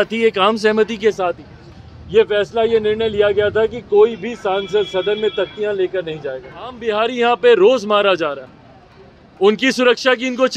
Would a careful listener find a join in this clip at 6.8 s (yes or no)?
yes